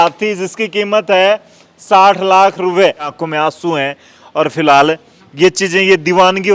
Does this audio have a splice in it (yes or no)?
yes